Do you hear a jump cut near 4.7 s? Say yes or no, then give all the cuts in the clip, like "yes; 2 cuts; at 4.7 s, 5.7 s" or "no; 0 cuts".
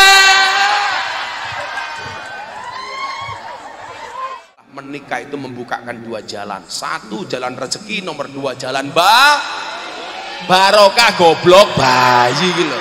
yes; 1 cut; at 4.7 s